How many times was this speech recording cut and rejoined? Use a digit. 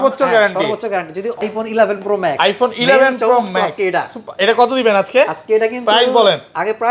1